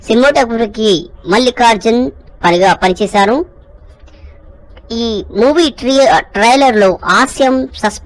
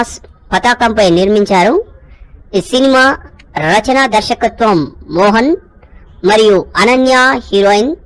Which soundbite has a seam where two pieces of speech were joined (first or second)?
first